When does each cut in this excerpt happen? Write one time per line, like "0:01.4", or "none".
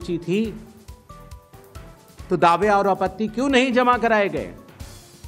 0:00.9
0:02.3